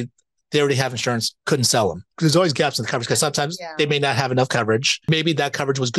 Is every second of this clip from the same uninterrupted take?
no; 3 cuts; at 1.3 s, 2.1 s, 5.1 s

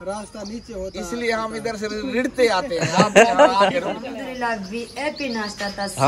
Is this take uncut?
no; 1 cut; at 4.1 s

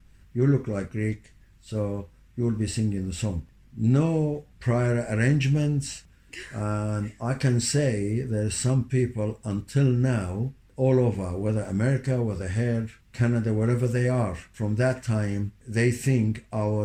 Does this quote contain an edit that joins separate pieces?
no; 0 cuts

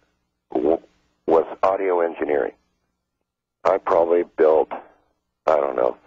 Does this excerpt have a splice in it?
yes; 1 cut; at 2.6 s

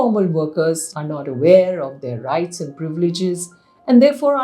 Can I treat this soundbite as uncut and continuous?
no; 1 cut; at 0.9 s

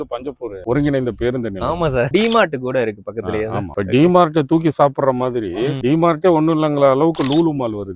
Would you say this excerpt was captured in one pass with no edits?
no; 3 cuts; at 2.1 s, 3.7 s, 5.8 s

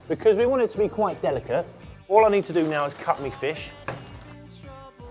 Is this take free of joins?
no; 1 cut; at 3.3 s

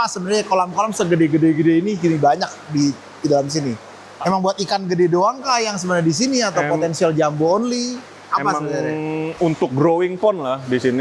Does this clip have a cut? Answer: no; 0 cuts

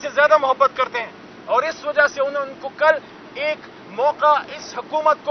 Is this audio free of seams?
yes; 0 cuts

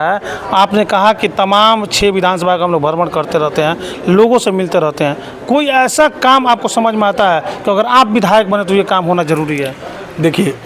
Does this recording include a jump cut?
no; 0 cuts

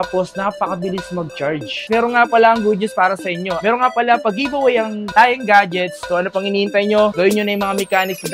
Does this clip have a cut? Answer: yes; 2 cuts; at 1.8 s, 6.1 s

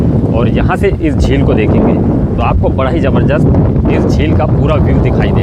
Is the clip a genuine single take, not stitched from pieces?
yes; 0 cuts

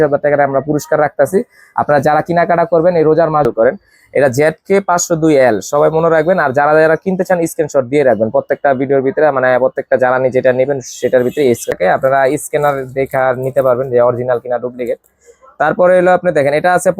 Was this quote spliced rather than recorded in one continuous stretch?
yes; 2 cuts; at 3.5 s, 11.8 s

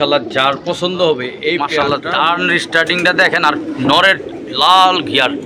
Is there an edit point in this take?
yes; 1 cut; at 1.8 s

